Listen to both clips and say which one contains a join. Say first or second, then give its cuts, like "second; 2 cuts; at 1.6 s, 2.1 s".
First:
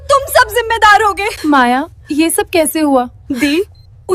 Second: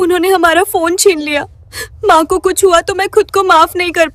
first; 3 cuts; at 1.3 s, 2.0 s, 3.2 s